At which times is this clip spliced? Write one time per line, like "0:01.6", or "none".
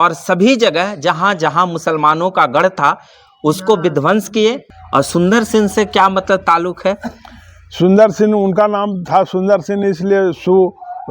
0:04.7